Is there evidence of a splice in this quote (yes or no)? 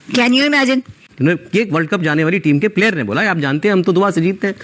yes